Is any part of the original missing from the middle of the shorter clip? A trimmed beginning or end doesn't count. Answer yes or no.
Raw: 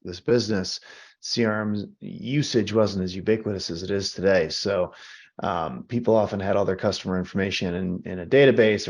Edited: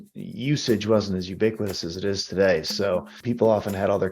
yes